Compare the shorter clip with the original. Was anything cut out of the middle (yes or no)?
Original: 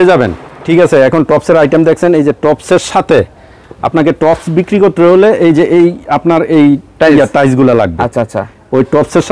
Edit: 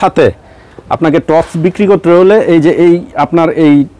no